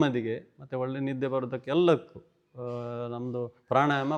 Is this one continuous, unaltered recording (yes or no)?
yes